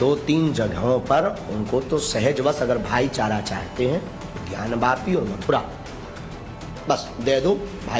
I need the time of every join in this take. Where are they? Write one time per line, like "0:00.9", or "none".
none